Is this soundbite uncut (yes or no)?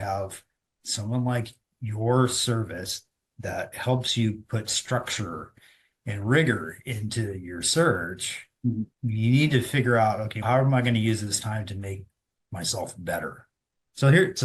yes